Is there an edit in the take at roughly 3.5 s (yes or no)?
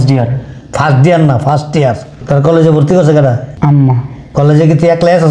yes